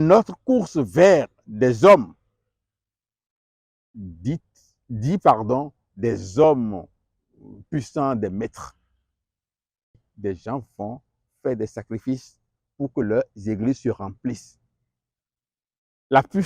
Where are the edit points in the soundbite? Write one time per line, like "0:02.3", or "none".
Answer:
0:10.1